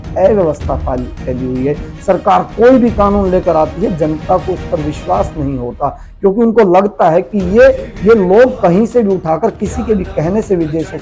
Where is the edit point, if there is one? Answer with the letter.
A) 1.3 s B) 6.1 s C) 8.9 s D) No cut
D